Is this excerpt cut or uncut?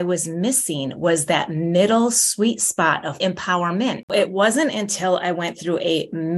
cut